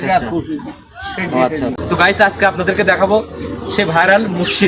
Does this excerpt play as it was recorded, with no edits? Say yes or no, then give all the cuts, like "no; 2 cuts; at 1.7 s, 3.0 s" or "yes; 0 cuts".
no; 1 cut; at 1.8 s